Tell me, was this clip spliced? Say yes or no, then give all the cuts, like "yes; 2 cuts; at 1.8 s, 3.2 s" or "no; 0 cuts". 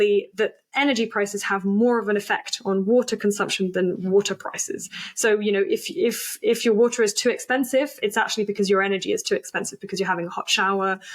no; 0 cuts